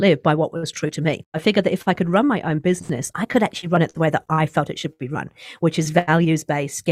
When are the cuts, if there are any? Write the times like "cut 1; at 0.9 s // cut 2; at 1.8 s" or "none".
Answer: cut 1; at 1.4 s